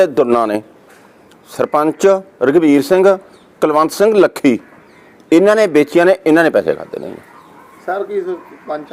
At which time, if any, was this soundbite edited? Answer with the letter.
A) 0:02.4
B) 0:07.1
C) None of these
C